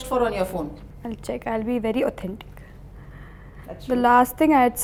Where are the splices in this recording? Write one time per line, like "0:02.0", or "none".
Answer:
none